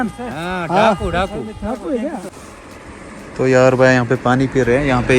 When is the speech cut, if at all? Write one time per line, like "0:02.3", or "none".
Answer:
0:02.4